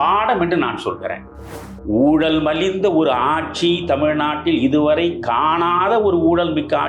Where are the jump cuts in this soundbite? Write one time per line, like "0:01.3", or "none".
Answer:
0:01.4